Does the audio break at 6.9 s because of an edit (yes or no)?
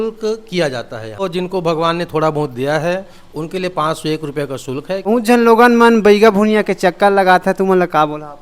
no